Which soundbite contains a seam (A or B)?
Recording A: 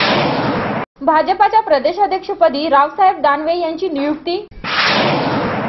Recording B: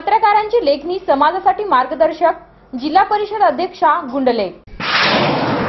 A